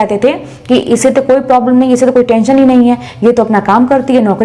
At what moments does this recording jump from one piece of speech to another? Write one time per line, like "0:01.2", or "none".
none

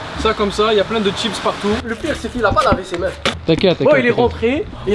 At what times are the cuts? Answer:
0:01.9
0:03.3

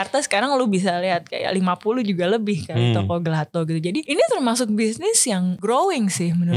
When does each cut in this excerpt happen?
0:04.1
0:05.6

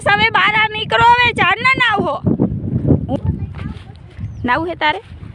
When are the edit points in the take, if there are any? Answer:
0:03.2

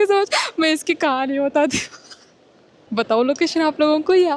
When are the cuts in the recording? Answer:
0:02.5

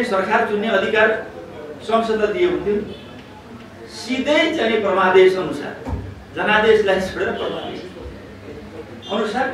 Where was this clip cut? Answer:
none

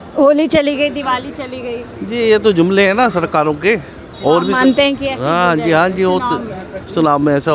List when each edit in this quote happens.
none

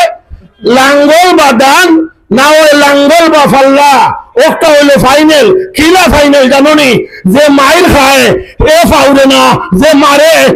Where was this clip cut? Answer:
none

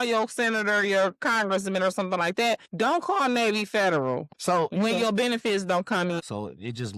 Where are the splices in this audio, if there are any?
0:02.7
0:04.3
0:06.2

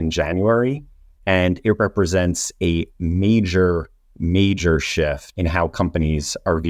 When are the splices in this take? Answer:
0:05.3

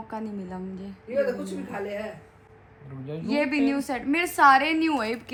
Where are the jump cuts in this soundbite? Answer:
none

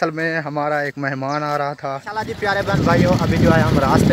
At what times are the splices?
0:02.1

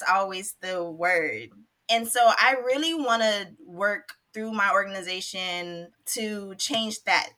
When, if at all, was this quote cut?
0:01.5
0:04.2
0:05.9

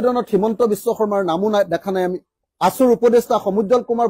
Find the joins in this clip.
0:02.4

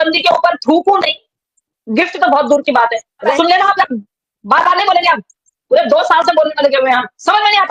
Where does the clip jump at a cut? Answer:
0:03.3
0:05.7

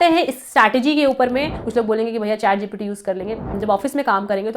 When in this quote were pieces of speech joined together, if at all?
0:01.6
0:03.6

